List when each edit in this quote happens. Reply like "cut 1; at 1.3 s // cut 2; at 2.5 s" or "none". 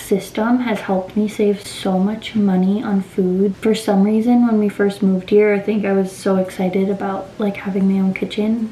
none